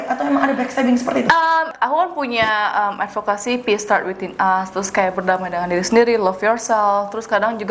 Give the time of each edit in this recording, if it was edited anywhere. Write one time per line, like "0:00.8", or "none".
0:01.7